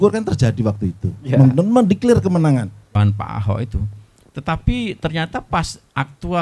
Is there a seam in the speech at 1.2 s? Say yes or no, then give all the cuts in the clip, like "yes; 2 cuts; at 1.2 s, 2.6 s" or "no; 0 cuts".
no; 1 cut; at 2.9 s